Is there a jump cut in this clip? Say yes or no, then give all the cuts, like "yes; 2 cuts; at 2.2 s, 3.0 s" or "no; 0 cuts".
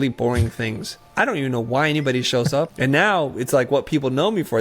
yes; 1 cut; at 2.7 s